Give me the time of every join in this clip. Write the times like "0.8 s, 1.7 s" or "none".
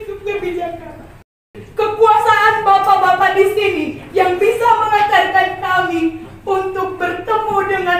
1.6 s